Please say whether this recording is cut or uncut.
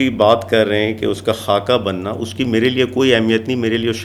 uncut